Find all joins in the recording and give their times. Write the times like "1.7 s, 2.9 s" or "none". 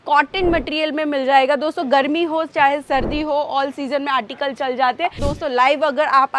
5.2 s